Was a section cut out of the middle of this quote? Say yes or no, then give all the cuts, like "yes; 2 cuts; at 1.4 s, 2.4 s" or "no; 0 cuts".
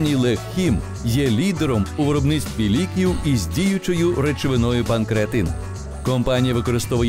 no; 0 cuts